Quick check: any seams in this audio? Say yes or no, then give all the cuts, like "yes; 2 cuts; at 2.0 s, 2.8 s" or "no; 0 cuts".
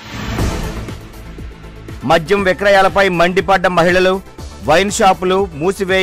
yes; 1 cut; at 1.8 s